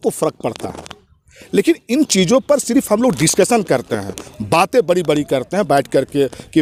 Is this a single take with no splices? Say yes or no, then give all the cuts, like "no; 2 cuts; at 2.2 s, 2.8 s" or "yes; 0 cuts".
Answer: yes; 0 cuts